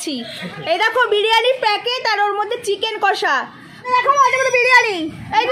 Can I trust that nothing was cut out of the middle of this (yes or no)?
no